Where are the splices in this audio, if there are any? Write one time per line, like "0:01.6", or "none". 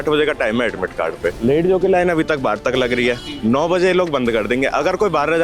none